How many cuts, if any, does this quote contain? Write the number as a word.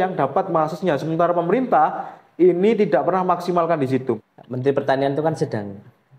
one